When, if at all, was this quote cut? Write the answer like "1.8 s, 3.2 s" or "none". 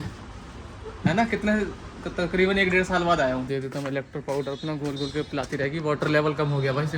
3.5 s